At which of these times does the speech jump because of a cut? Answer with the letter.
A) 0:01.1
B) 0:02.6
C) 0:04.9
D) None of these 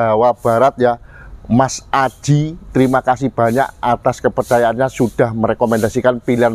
D